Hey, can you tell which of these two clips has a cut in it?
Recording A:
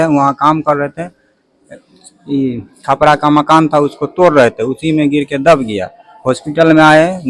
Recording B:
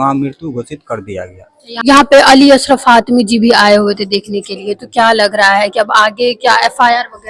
B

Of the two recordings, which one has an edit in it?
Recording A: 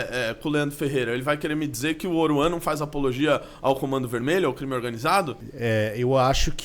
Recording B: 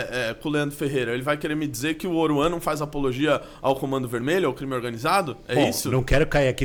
A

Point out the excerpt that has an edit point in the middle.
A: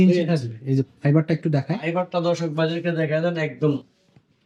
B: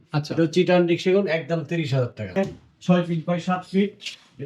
B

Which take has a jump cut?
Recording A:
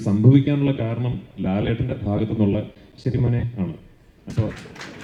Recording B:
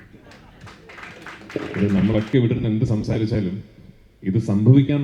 B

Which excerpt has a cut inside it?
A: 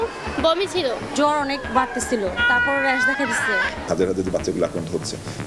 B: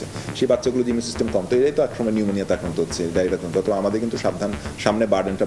A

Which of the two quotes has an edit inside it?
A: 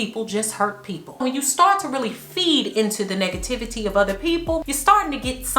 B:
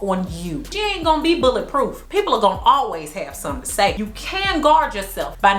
A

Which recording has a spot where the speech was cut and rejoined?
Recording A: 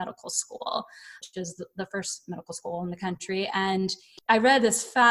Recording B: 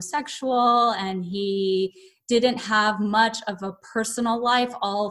A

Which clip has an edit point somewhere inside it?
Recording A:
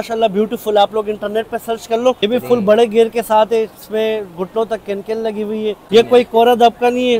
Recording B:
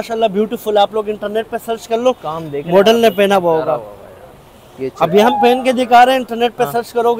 A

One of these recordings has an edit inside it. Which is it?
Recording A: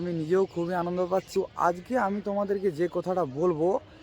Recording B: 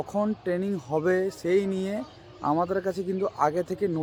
A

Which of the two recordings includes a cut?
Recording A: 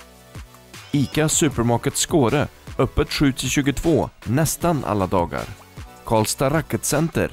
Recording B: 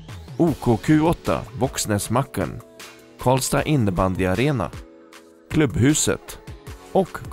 A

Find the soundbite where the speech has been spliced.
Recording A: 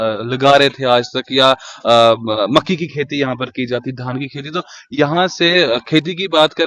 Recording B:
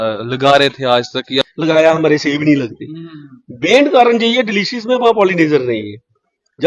B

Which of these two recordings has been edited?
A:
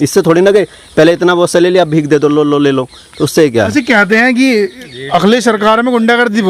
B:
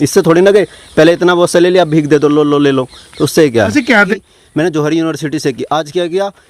B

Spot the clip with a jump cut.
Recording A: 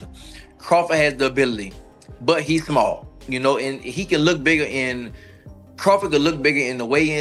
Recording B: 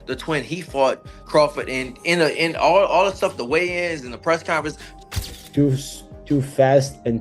B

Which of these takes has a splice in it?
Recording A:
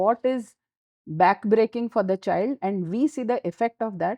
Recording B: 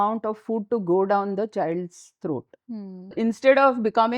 B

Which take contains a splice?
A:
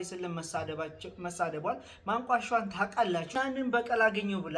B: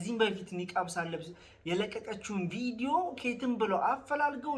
A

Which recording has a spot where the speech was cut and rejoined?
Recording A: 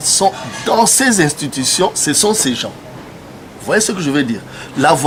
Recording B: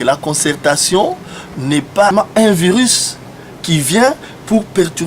B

